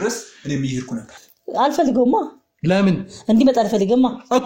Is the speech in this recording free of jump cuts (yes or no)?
no